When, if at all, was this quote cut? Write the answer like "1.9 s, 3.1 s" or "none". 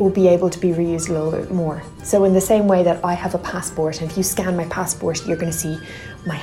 none